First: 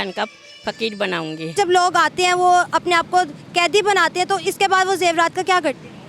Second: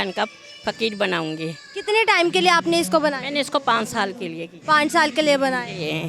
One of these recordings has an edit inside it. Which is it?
first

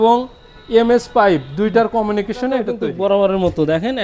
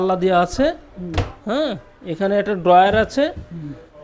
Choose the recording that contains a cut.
first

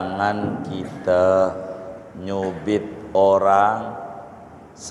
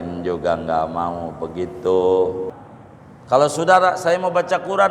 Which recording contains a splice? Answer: second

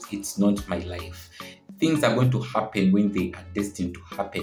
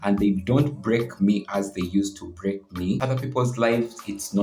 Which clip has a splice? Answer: second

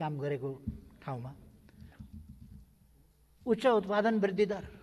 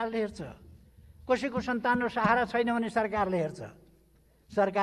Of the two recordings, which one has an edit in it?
first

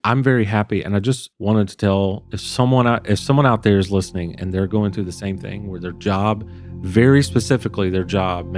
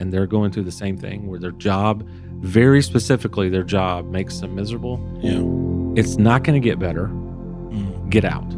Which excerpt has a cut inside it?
first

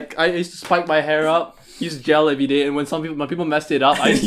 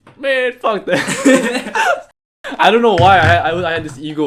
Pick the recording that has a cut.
second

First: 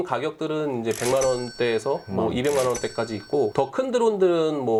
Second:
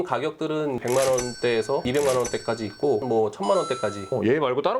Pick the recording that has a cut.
second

